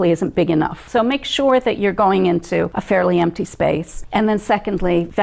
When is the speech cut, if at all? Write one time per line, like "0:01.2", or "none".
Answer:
0:00.8
0:02.8
0:03.9